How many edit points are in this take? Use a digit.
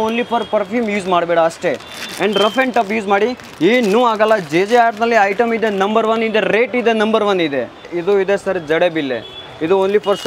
1